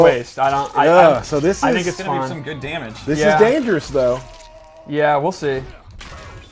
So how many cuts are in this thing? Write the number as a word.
zero